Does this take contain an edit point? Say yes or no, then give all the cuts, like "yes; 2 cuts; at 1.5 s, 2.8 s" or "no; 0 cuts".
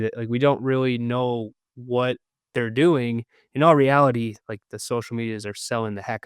no; 0 cuts